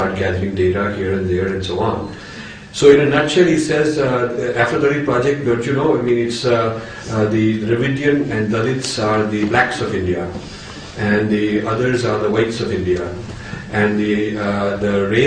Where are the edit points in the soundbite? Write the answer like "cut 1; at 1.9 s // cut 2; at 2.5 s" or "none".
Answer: cut 1; at 5.3 s